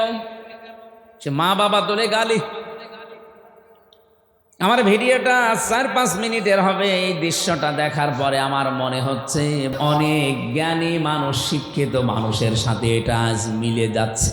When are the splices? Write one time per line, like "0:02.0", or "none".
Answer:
0:09.7